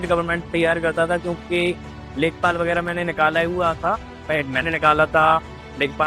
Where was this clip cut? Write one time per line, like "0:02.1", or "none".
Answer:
none

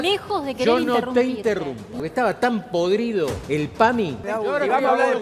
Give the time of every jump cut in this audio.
0:01.9
0:03.4
0:04.3

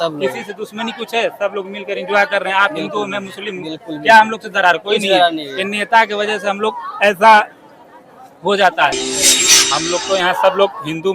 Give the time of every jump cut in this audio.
0:09.3

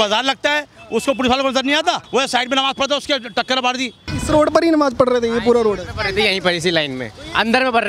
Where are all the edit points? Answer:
0:02.0
0:04.1

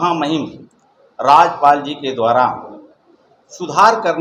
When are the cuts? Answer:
none

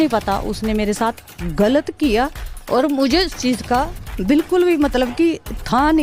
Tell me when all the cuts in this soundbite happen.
none

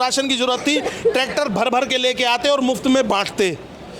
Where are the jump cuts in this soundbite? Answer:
none

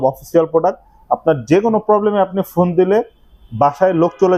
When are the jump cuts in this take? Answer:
none

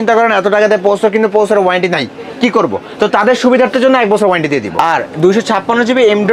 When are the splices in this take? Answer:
0:04.8

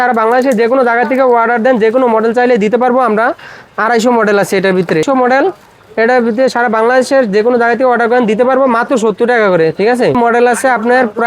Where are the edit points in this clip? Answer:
0:05.1
0:10.2

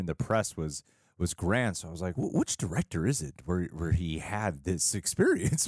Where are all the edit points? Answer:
0:02.1

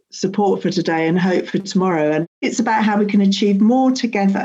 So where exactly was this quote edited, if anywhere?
0:02.4

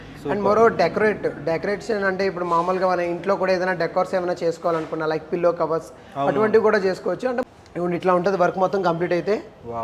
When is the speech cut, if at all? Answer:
0:07.4

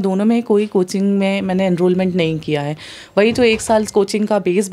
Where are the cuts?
none

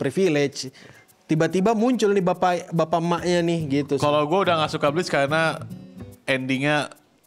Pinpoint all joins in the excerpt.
none

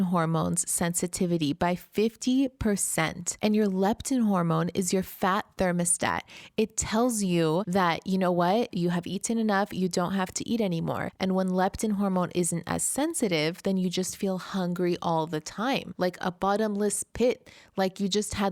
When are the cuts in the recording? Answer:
0:03.2
0:07.7
0:11.1
0:15.9

